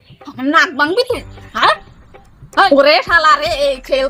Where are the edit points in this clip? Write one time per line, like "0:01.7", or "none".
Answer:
0:02.7